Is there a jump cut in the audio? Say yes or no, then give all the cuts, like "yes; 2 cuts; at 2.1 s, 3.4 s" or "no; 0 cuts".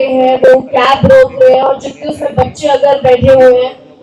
no; 0 cuts